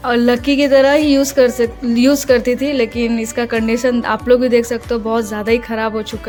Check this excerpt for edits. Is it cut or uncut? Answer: uncut